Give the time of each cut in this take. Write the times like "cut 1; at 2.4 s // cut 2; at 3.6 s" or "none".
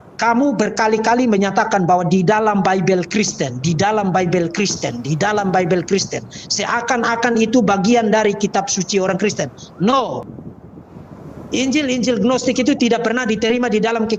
cut 1; at 10.2 s